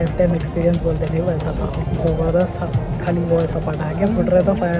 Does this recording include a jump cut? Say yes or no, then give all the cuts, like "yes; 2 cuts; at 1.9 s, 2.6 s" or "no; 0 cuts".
no; 0 cuts